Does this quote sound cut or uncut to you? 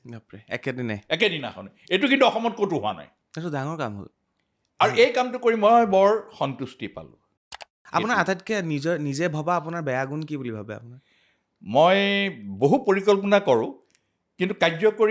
cut